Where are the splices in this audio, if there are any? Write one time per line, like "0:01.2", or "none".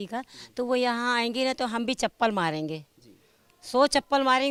none